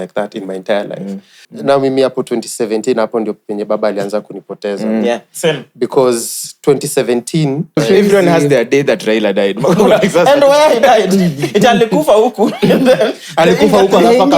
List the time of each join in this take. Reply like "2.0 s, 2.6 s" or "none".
1.5 s, 7.7 s